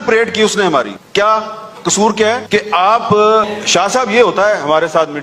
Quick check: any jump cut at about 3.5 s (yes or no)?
yes